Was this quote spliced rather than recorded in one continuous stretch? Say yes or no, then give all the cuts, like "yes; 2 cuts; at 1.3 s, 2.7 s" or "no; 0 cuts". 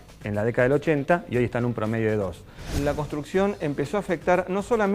yes; 1 cut; at 2.7 s